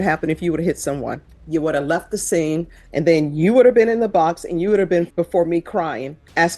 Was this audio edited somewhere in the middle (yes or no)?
yes